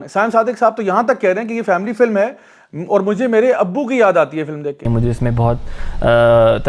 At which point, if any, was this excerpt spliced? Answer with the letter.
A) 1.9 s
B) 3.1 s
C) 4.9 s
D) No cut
C